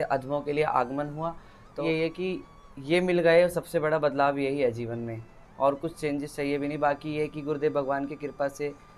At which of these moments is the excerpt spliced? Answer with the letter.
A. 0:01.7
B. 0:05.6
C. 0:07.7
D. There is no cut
A